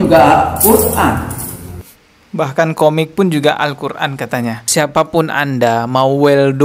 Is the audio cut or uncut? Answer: cut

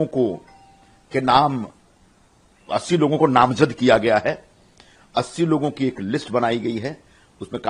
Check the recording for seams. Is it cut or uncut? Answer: uncut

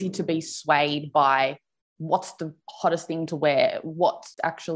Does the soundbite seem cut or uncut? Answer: uncut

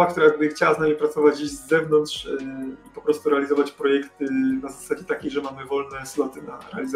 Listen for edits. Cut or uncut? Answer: uncut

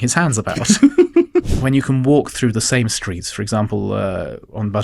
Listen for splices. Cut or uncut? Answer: cut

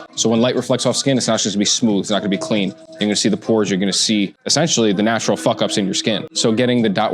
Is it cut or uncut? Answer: cut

